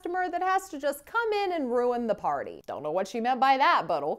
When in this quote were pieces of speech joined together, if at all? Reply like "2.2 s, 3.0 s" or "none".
2.5 s

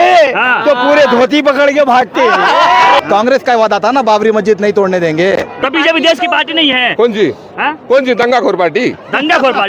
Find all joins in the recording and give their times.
3.0 s, 5.6 s

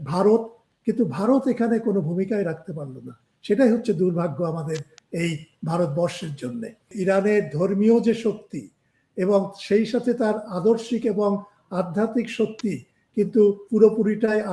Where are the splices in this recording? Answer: 6.9 s

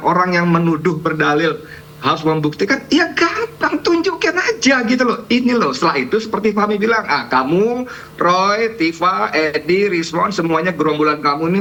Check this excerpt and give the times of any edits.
none

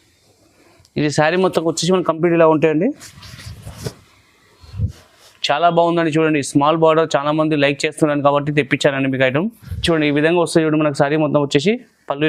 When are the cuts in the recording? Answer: 9.7 s

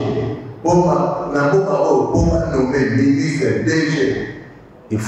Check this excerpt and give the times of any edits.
none

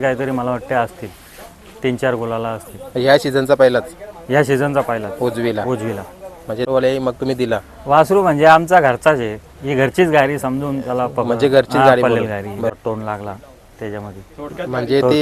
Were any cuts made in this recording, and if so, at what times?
6.6 s, 12.7 s

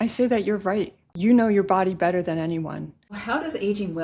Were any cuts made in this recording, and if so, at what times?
1.0 s, 3.2 s

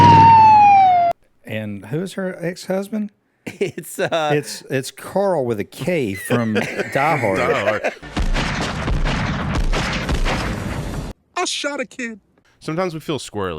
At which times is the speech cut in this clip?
1.1 s, 11.1 s, 12.3 s

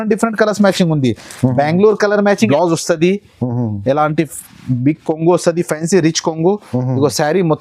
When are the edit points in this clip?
2.5 s

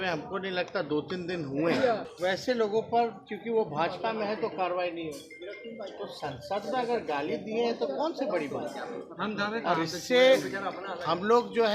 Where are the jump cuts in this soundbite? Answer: 2.1 s

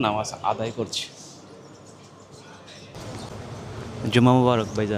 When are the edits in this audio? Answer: 3.0 s

